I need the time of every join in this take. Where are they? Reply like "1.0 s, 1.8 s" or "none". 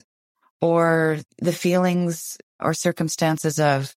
1.3 s, 2.6 s

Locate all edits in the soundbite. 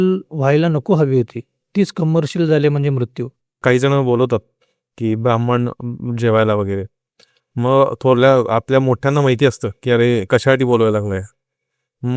3.6 s

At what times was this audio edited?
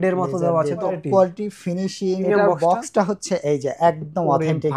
1.0 s, 2.2 s

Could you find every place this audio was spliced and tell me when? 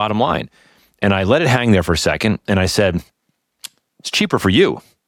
none

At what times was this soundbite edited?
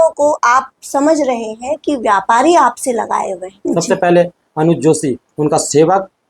3.5 s

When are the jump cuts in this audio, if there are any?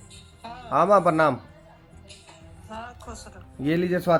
none

